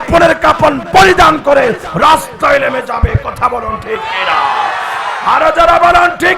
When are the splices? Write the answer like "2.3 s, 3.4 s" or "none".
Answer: none